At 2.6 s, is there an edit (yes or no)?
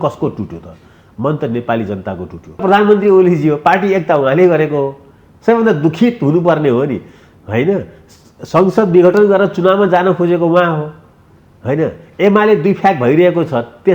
yes